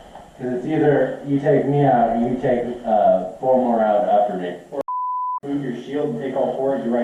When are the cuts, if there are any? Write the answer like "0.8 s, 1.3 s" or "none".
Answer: none